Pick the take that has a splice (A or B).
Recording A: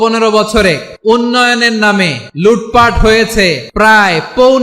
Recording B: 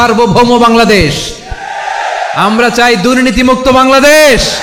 A